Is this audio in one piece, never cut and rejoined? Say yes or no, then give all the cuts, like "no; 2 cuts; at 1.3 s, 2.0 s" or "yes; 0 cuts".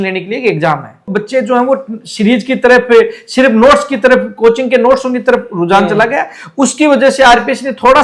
no; 1 cut; at 1.1 s